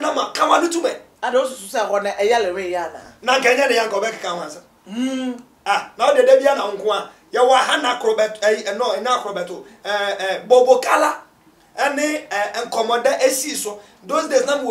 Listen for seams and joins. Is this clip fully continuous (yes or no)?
no